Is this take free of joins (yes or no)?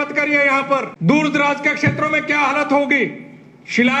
no